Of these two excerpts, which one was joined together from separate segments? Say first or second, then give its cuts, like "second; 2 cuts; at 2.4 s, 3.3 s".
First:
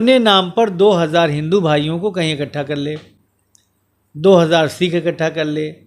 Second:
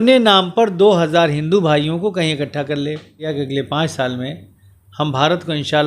second; 1 cut; at 3.3 s